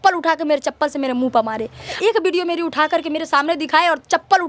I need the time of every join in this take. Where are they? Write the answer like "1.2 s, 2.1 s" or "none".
none

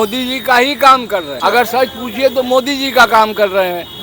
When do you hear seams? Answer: 1.3 s

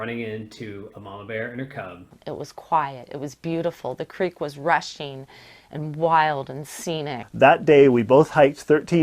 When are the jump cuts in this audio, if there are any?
2.1 s, 7.2 s

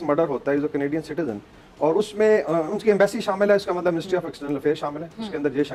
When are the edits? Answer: none

